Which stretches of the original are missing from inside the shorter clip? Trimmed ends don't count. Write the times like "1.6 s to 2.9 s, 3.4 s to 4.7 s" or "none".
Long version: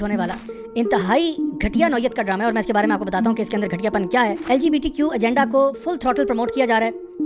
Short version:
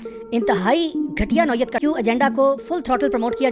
2.2 s to 4.9 s

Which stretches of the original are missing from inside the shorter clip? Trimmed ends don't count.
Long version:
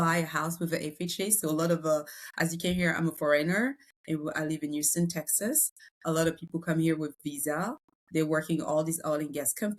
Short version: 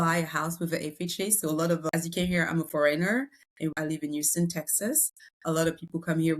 1.8 s to 2.3 s, 4.2 s to 4.3 s

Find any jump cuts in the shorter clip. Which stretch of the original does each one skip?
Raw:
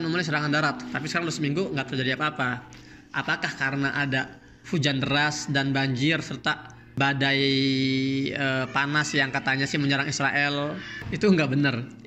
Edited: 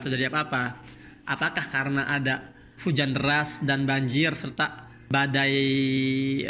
none

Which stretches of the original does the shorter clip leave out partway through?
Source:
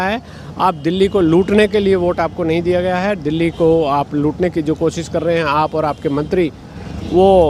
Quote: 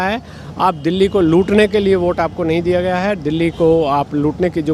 none

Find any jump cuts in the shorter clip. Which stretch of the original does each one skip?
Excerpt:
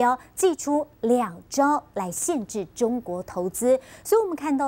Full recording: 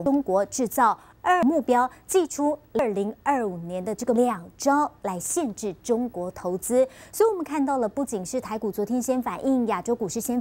2.8 s to 4.2 s

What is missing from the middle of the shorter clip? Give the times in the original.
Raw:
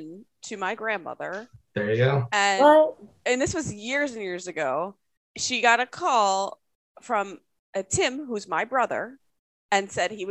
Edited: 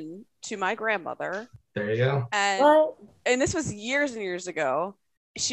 none

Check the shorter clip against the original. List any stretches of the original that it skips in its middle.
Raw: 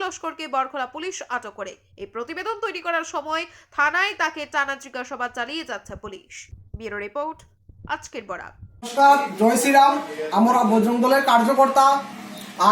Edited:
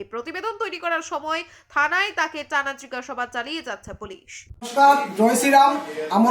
6.8 s to 9.0 s

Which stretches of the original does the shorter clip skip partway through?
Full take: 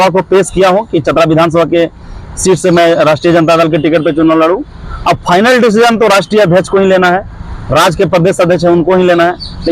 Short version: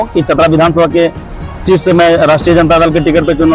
none

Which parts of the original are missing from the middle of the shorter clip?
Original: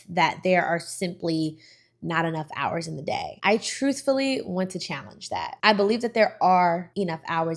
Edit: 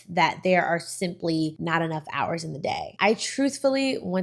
1.6 s to 2.0 s

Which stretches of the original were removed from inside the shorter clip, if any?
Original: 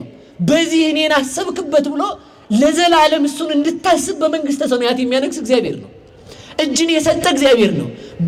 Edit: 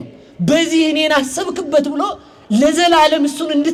none

